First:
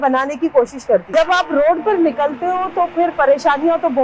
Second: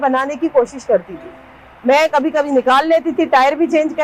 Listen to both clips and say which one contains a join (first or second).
first